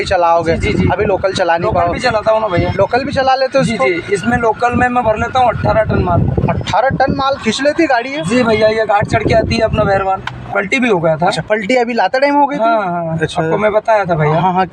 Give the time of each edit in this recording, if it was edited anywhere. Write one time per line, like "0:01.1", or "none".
0:10.4

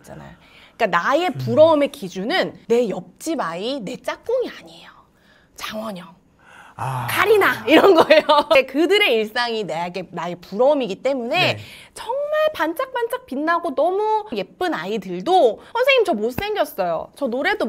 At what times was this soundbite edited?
none

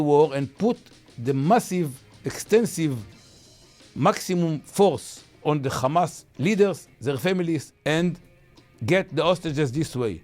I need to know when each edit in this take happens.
0:05.4
0:07.7

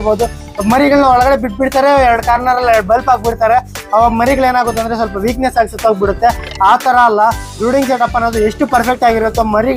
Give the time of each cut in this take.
none

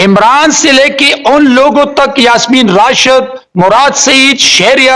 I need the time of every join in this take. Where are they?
none

